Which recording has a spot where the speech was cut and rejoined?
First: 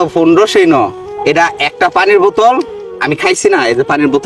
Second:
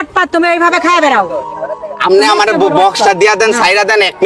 first; 1 cut; at 1.0 s

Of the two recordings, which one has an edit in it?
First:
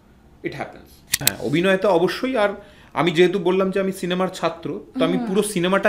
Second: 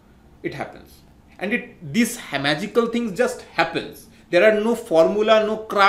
first; 1 cut; at 1.3 s

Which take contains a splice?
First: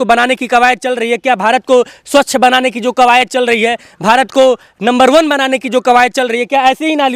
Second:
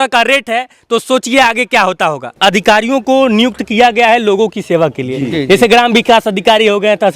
second; 1 cut; at 2.4 s

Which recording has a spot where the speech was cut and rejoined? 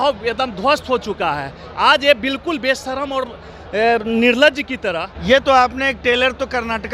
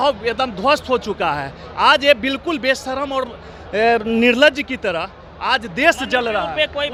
first; 1 cut; at 5.1 s

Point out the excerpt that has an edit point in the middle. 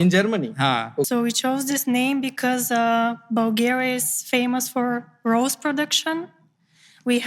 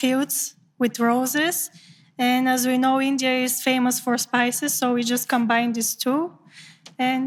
first; 1 cut; at 1.1 s

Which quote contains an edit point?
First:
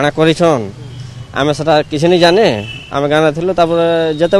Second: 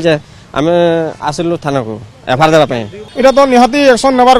second; 1 cut; at 3.0 s

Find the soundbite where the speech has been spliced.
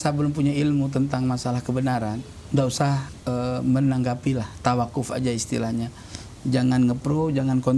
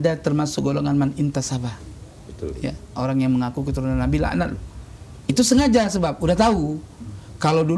first; 2 cuts; at 2.3 s, 3.1 s

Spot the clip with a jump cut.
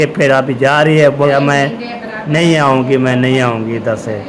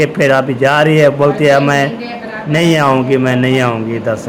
first; 1 cut; at 1.3 s

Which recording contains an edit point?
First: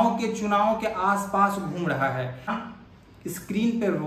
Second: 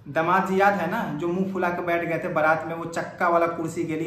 first; 1 cut; at 2.5 s

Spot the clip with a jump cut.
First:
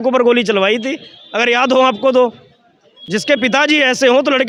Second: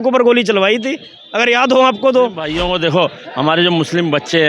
second; 1 cut; at 2.5 s

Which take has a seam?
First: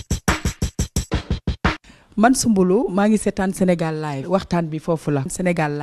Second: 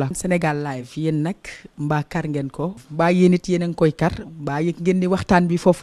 first; 1 cut; at 1.3 s

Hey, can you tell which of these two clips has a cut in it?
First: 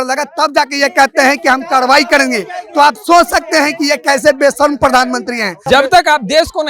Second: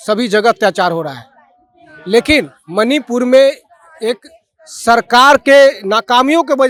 first; 1 cut; at 5.6 s

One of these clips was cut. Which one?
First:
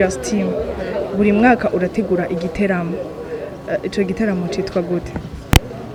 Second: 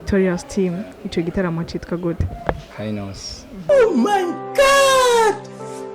second; 1 cut; at 3.6 s

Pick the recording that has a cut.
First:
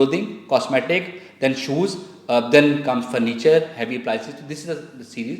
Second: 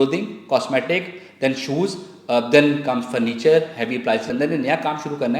second; 1 cut; at 4.3 s

